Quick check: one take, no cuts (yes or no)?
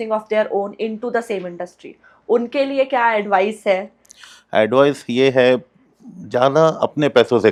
yes